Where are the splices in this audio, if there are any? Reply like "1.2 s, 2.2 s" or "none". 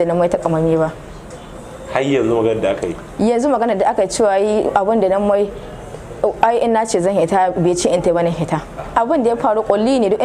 8.8 s